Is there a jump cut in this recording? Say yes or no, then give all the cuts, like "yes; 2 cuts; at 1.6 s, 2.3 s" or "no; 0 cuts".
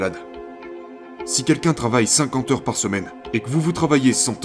yes; 2 cuts; at 0.8 s, 3.1 s